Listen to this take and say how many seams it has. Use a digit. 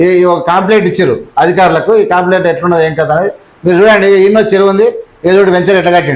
0